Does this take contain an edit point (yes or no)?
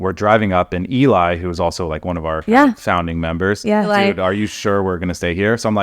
yes